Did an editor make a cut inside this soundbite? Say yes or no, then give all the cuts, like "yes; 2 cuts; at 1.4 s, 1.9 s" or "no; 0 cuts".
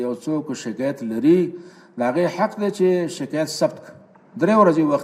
no; 0 cuts